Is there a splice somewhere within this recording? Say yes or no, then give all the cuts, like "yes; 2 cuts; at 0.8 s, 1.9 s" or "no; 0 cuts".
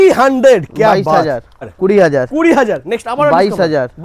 yes; 1 cut; at 1.7 s